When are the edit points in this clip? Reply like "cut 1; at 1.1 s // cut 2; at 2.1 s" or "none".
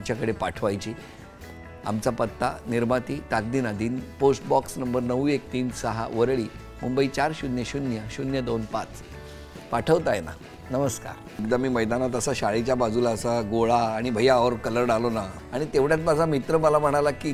cut 1; at 11.4 s // cut 2; at 15.3 s